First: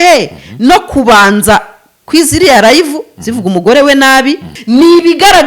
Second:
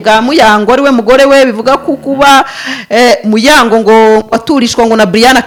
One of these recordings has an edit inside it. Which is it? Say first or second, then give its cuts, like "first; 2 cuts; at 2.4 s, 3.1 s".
first; 1 cut; at 4.5 s